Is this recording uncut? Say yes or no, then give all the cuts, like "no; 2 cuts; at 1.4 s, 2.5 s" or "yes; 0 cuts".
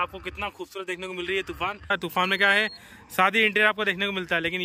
no; 1 cut; at 1.9 s